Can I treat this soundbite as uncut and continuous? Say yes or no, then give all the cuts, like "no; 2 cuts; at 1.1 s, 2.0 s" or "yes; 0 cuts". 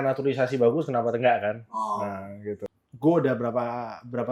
no; 1 cut; at 2.6 s